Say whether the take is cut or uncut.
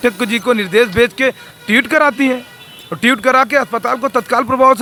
uncut